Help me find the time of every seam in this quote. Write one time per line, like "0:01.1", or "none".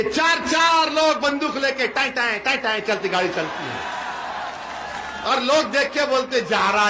none